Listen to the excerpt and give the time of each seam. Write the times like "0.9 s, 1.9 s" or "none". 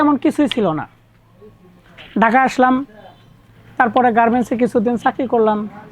none